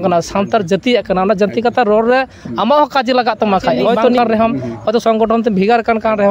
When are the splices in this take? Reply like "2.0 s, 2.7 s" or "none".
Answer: 4.2 s